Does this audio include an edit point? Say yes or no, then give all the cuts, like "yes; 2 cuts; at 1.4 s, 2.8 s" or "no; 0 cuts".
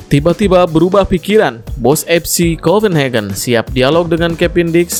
no; 0 cuts